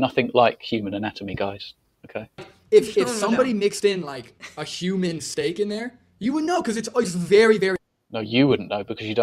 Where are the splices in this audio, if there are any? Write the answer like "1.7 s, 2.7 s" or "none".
none